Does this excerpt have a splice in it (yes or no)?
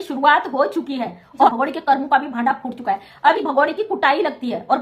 yes